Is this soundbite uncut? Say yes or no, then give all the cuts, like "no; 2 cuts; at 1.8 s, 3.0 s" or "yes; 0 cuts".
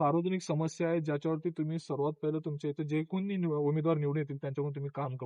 yes; 0 cuts